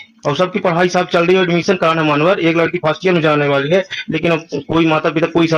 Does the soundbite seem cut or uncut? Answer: uncut